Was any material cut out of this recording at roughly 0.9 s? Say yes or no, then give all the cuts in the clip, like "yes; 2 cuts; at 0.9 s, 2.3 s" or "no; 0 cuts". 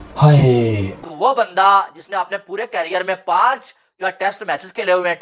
yes; 1 cut; at 0.9 s